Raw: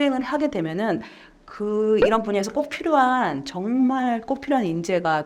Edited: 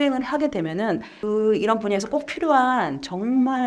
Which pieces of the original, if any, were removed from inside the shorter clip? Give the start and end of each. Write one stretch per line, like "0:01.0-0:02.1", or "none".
0:01.1-0:01.6